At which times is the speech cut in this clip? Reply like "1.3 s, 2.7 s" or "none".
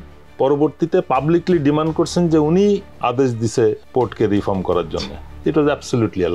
none